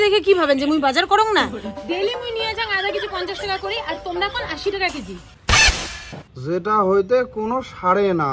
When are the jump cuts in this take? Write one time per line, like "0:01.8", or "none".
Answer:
0:06.4